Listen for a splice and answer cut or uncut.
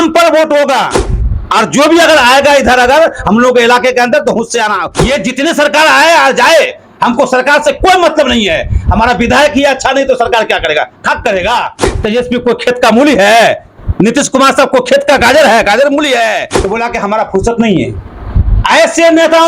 cut